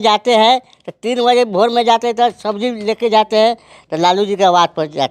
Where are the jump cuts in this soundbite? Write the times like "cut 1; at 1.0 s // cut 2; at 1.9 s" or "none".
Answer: none